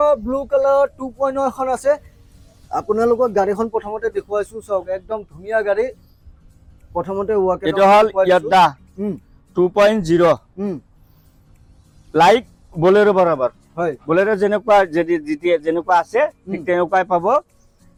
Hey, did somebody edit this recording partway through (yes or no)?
no